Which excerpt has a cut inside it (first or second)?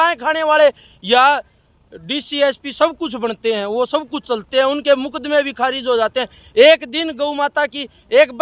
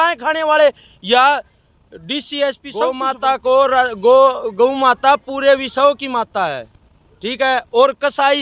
second